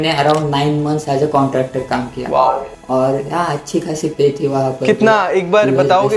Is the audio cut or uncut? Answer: uncut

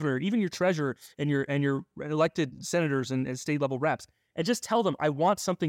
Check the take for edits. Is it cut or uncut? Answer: cut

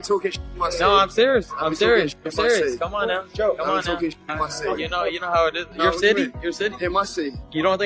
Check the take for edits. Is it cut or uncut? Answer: cut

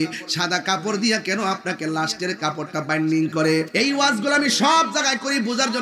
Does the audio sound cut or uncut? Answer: cut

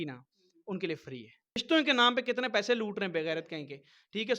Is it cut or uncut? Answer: cut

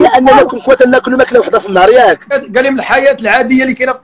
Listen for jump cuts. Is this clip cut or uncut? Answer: cut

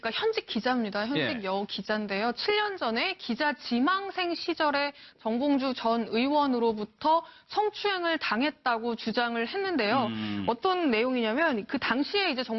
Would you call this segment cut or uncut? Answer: uncut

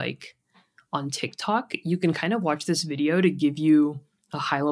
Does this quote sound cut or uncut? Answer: uncut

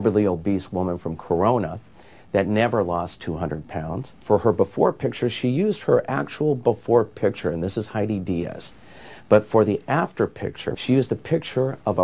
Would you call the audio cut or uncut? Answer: cut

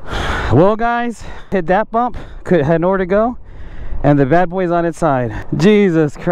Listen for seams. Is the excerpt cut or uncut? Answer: cut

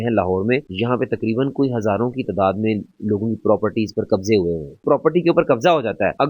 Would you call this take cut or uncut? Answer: cut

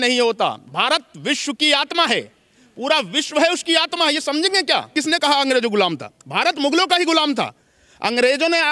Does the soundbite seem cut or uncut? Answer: cut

